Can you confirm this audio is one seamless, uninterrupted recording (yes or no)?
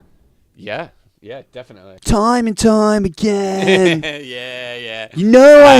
no